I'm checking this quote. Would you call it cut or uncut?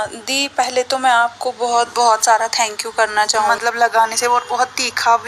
cut